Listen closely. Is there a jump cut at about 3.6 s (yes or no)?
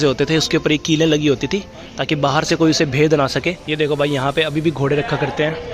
yes